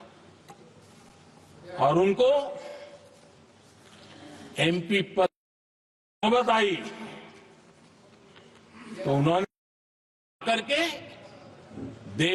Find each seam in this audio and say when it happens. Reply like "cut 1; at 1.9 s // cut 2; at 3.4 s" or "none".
none